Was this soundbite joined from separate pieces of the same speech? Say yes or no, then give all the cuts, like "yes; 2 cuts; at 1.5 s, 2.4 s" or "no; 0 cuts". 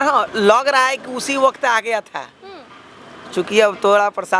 no; 0 cuts